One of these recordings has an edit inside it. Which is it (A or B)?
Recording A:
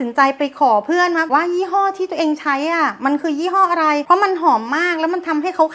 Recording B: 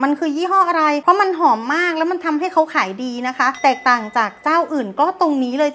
A